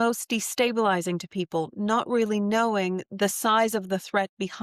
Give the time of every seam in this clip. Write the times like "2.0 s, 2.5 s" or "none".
none

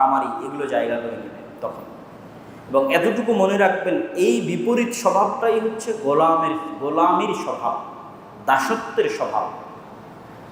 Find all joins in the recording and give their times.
none

